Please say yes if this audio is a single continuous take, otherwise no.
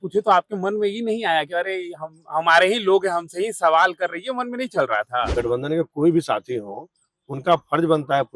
no